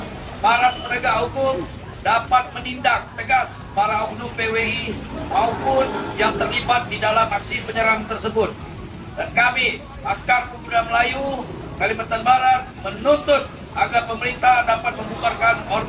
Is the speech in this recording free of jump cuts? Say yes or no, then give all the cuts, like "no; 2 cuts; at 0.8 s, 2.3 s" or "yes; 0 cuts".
yes; 0 cuts